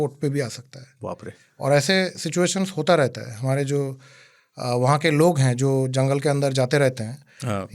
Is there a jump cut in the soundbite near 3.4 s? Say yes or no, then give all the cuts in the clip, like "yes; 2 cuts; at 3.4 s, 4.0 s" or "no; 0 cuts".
no; 0 cuts